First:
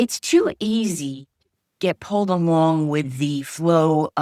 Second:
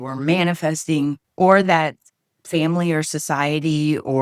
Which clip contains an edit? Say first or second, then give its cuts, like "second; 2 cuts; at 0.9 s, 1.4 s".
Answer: second; 1 cut; at 1.2 s